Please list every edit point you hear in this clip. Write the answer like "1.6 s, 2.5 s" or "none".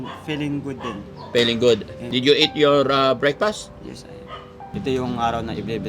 2.0 s, 4.7 s